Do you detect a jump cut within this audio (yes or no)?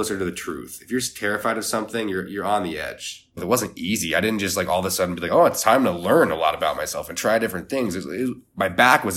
yes